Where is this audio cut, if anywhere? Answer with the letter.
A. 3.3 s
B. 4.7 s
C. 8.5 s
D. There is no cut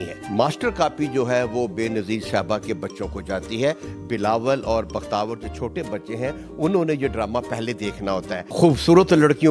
C